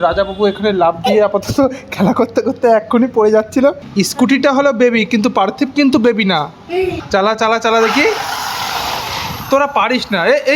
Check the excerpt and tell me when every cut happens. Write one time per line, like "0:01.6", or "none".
0:03.9
0:07.0